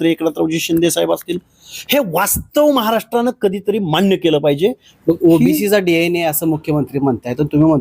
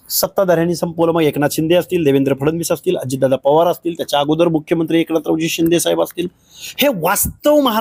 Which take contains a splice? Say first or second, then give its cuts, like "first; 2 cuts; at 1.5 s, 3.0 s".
first; 1 cut; at 4.9 s